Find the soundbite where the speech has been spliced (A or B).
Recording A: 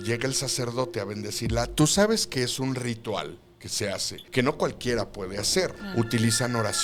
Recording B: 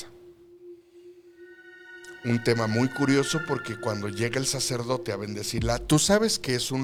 A